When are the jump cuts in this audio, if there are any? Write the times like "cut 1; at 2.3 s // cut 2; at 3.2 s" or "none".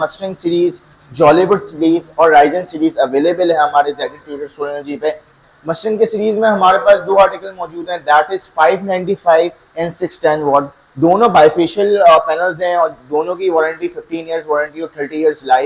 cut 1; at 5.3 s